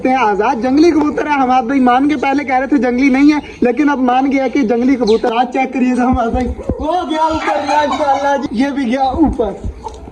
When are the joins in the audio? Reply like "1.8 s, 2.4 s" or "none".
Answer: 5.3 s, 8.4 s